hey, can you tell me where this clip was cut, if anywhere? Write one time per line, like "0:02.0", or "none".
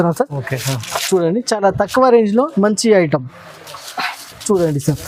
none